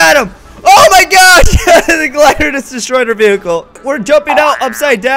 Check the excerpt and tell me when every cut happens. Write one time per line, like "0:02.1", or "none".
0:03.8